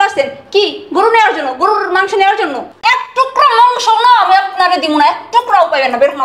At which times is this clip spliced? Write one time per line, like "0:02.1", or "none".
0:02.8

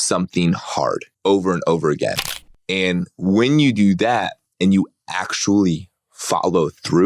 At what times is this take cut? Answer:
0:01.1

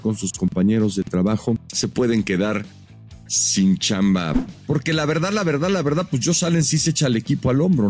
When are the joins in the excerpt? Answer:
0:01.7
0:04.4

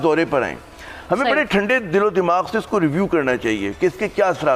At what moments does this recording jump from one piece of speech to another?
none

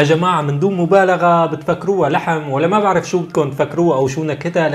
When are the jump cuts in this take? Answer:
none

